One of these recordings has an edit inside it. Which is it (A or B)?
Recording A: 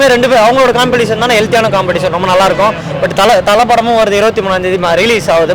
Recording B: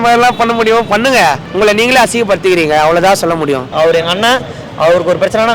B